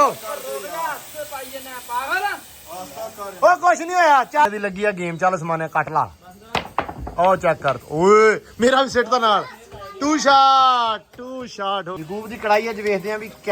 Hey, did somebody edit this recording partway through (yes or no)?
yes